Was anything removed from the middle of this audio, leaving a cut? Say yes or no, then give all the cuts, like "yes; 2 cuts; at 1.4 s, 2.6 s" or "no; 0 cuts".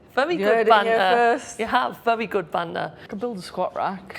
yes; 1 cut; at 3.0 s